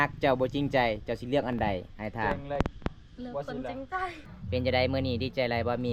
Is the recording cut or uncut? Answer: cut